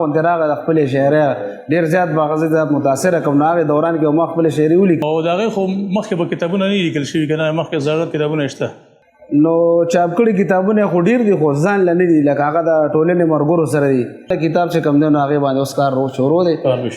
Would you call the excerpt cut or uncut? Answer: cut